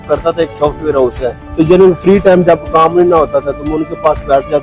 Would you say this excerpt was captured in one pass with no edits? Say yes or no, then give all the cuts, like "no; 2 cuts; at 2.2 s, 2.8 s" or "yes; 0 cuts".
no; 1 cut; at 1.4 s